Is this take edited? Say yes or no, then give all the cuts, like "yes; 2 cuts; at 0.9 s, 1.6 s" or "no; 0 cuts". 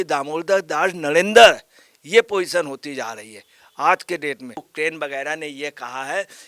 yes; 1 cut; at 4.7 s